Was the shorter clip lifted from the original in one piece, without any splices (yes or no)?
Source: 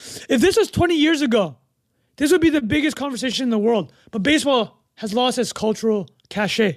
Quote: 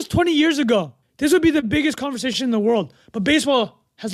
no